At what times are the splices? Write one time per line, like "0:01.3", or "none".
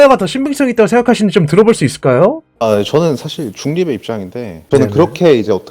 0:04.6